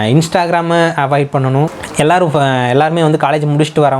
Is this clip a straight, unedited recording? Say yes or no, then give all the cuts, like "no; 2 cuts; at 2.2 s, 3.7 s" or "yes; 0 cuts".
no; 1 cut; at 1.8 s